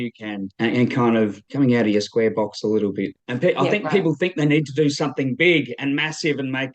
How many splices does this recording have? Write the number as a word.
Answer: two